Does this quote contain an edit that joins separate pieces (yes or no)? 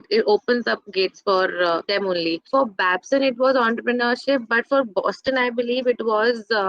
yes